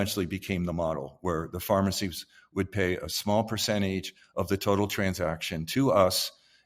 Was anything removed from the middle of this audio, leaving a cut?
no; 0 cuts

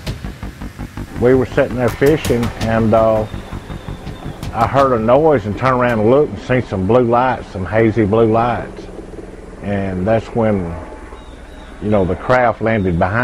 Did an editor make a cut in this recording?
no; 0 cuts

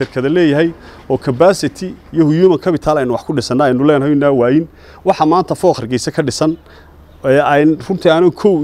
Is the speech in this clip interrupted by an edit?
no; 0 cuts

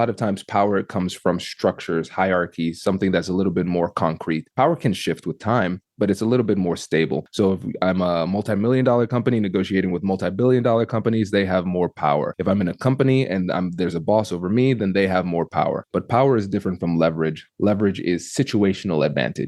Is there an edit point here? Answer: no; 0 cuts

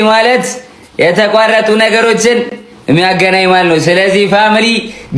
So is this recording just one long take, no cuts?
yes; 0 cuts

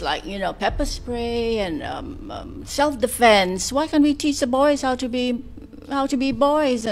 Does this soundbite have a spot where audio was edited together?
no; 0 cuts

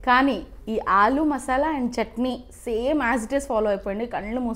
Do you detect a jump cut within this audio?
no; 0 cuts

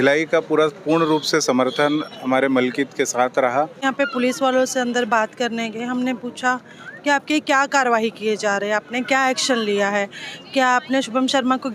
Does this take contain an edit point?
yes; 1 cut; at 3.8 s

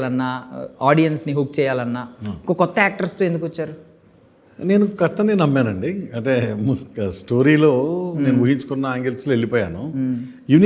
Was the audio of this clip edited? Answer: no; 0 cuts

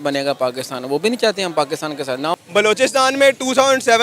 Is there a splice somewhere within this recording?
yes; 1 cut; at 2.3 s

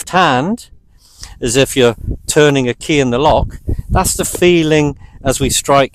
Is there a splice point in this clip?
no; 0 cuts

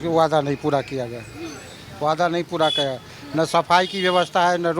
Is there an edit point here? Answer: no; 0 cuts

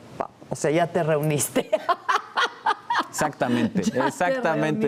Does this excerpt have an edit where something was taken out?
no; 0 cuts

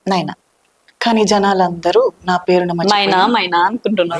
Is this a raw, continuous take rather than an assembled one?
yes; 0 cuts

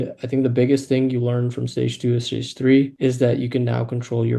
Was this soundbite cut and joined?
yes; 1 cut; at 2.9 s

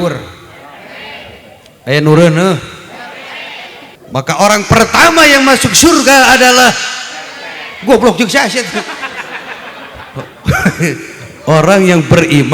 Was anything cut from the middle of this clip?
yes; 1 cut; at 4.0 s

